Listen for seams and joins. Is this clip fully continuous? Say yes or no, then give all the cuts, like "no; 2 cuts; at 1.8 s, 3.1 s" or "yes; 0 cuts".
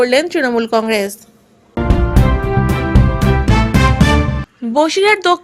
no; 2 cuts; at 1.8 s, 4.5 s